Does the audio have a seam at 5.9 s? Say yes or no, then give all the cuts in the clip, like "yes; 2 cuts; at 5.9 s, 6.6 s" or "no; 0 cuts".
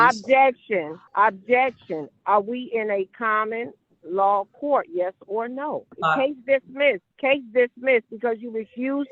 yes; 3 cuts; at 1.0 s, 5.9 s, 7.1 s